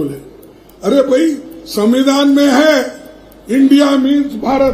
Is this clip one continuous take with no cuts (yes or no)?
yes